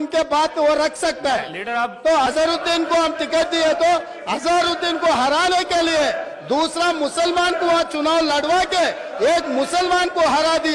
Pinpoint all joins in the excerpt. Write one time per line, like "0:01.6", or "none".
0:02.0